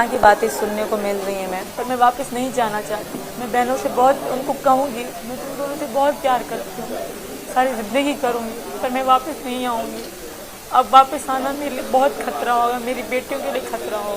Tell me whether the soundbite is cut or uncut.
cut